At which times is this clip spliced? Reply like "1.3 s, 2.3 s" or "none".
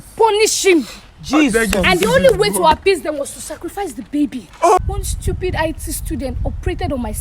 4.8 s